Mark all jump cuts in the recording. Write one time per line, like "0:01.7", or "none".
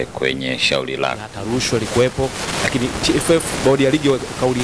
0:01.3